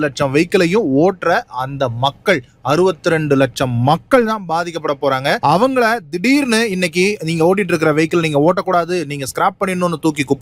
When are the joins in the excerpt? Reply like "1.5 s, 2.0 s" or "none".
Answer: none